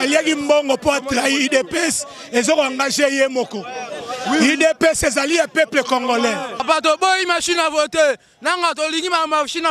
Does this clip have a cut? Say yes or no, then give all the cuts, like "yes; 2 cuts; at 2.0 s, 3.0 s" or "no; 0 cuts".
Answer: yes; 1 cut; at 6.6 s